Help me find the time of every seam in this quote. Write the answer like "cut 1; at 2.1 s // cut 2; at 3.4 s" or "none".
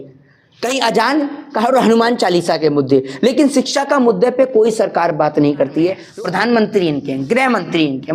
cut 1; at 6.0 s

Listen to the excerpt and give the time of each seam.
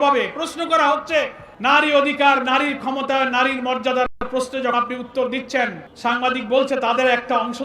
cut 1; at 1.4 s // cut 2; at 5.9 s

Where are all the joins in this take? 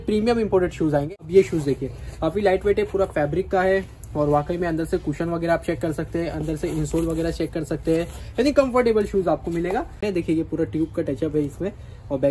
cut 1; at 1.2 s // cut 2; at 10.0 s

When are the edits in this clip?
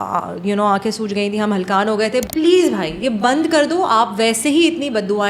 cut 1; at 2.3 s

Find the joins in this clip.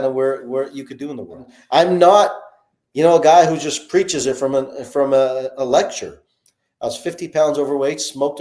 cut 1; at 1.5 s

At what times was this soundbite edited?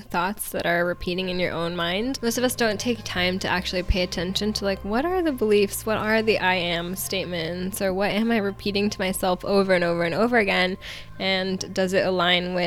cut 1; at 2.1 s

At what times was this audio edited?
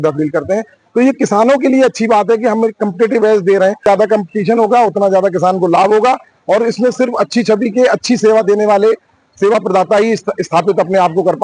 cut 1; at 3.8 s

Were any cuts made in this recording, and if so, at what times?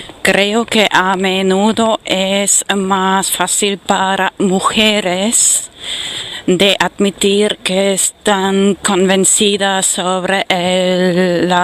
cut 1; at 5.6 s

